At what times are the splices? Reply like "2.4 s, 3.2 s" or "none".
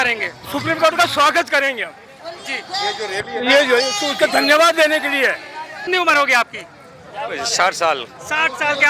5.8 s